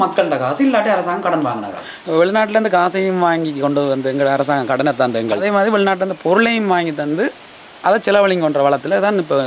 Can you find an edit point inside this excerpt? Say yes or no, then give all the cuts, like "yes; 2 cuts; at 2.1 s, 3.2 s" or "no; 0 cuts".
yes; 2 cuts; at 1.7 s, 5.4 s